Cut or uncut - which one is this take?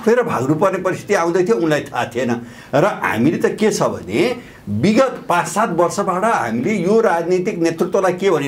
uncut